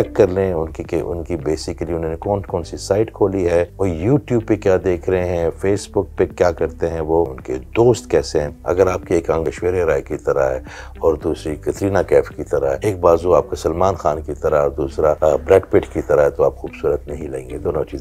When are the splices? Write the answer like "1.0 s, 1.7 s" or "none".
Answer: 3.7 s, 7.5 s, 8.5 s, 9.4 s, 12.8 s, 15.2 s